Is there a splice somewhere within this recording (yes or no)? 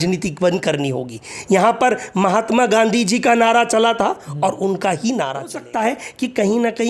yes